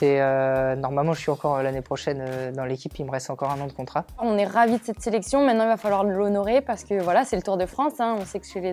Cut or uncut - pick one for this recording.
cut